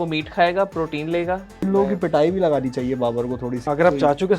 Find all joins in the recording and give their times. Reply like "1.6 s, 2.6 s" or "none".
1.7 s, 3.6 s

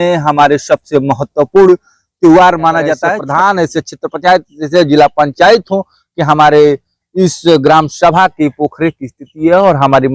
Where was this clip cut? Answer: 3.2 s

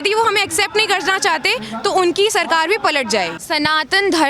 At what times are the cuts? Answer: 3.4 s

